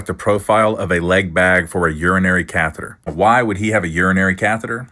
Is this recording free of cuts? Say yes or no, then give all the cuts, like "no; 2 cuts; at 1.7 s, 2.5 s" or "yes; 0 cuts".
no; 1 cut; at 3.1 s